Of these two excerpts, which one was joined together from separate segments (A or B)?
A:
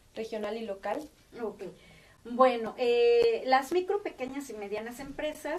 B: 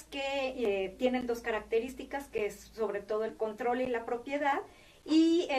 B